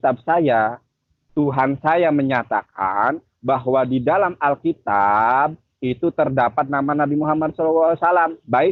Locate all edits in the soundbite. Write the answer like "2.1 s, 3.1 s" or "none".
none